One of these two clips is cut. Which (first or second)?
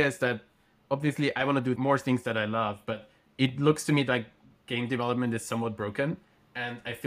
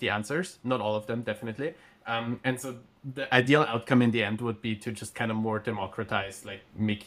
first